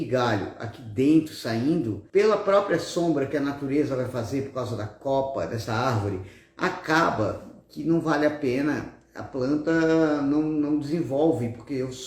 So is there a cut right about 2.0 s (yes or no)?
yes